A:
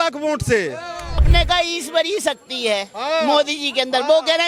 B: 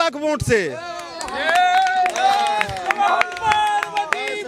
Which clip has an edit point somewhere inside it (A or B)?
A